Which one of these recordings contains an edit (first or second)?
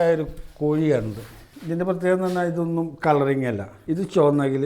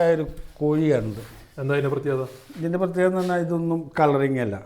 first